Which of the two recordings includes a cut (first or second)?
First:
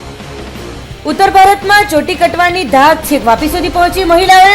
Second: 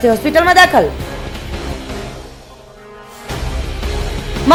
first